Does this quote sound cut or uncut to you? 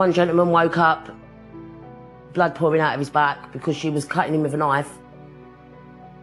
uncut